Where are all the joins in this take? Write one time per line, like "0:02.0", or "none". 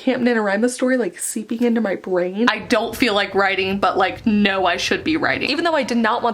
0:02.5
0:05.4